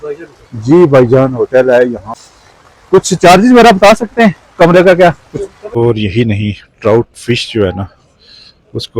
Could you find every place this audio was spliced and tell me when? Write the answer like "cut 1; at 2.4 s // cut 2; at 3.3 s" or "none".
cut 1; at 2.1 s // cut 2; at 5.8 s